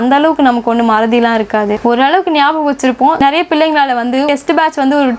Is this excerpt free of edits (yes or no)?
no